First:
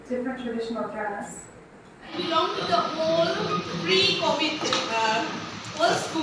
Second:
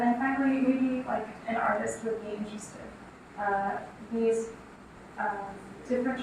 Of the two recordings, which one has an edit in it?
first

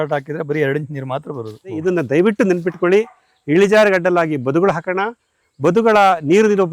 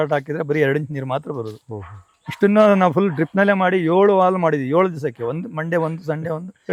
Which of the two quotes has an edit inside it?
first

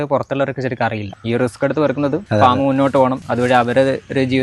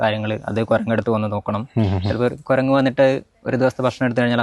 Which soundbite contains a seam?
first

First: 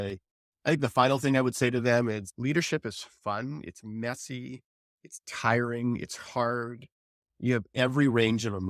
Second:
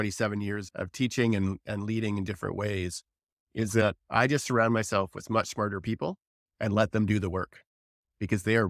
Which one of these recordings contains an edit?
second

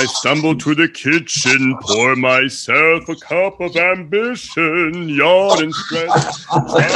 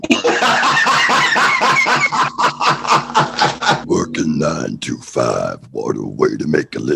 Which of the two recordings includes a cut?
second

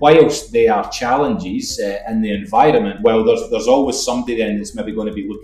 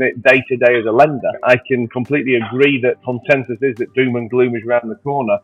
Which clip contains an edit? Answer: second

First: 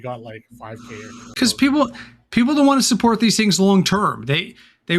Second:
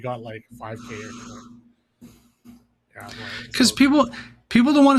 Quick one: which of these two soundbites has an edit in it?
first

